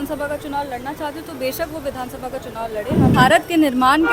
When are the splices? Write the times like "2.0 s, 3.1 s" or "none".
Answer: 3.1 s